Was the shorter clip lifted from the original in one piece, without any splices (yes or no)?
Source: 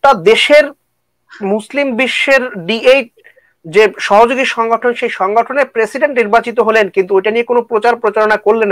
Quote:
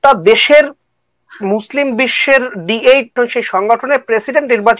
no